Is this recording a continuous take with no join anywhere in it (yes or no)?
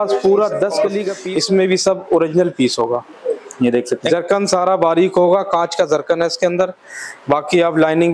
no